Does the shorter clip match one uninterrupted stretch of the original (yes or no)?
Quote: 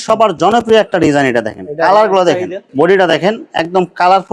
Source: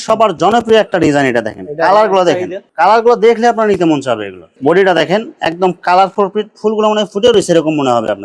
no